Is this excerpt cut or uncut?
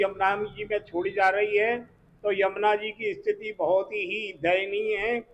uncut